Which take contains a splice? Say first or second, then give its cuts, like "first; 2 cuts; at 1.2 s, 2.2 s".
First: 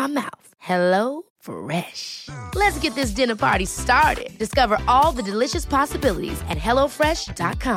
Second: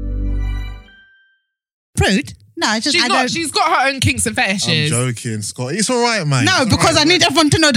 second; 1 cut; at 1.9 s